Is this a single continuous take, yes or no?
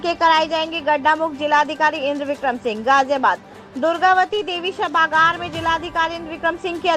yes